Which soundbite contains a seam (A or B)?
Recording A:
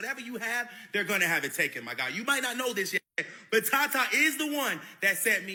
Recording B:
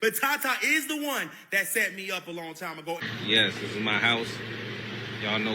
B